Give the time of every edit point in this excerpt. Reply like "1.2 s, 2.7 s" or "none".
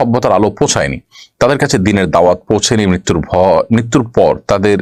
none

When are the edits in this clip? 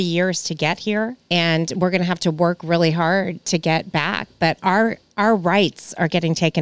1.2 s, 3.4 s

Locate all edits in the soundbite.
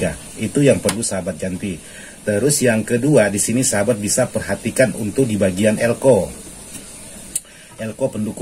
none

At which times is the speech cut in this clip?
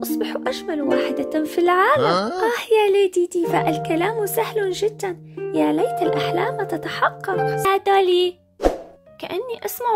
7.6 s

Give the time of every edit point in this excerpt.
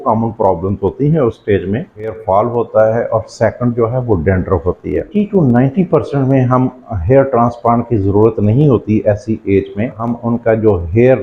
2.2 s, 5.1 s, 10.1 s

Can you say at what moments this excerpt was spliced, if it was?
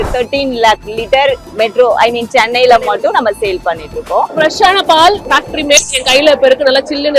1.5 s, 4.3 s, 5.2 s

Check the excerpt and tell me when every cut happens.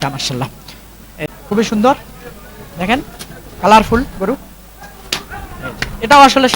1.3 s

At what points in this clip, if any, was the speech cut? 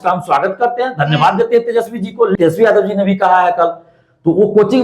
2.3 s

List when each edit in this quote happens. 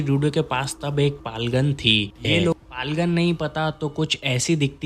2.5 s

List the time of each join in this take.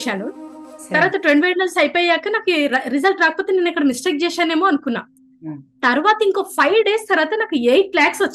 none

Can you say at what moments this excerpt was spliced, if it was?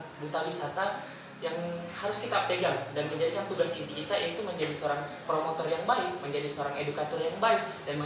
none

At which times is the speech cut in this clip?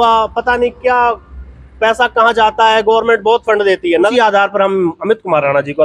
4.1 s

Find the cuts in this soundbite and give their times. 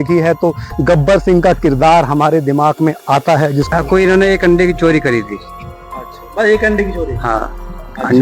3.7 s

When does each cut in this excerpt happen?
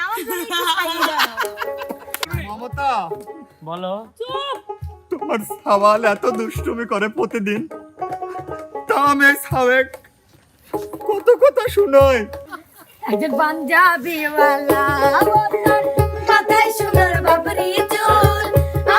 2.2 s, 12.4 s

